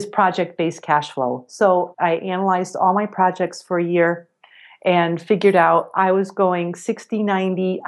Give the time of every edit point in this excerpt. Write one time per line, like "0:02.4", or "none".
0:01.9